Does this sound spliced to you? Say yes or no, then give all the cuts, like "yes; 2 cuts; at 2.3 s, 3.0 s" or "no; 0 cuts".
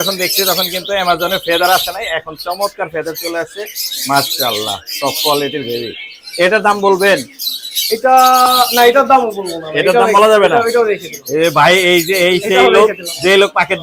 no; 0 cuts